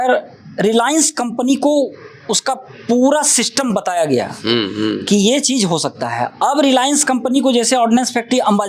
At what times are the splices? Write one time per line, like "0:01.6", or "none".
none